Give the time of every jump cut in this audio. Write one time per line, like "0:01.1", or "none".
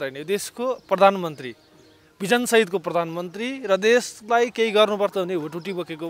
none